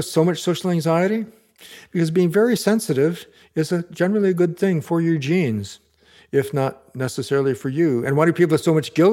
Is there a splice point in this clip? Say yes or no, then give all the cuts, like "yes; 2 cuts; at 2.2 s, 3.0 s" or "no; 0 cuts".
no; 0 cuts